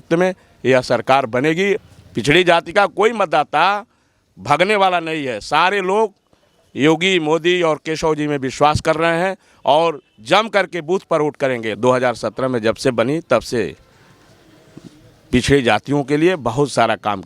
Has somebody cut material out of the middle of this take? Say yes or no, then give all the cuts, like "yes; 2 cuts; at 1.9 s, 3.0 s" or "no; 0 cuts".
yes; 2 cuts; at 1.8 s, 11.7 s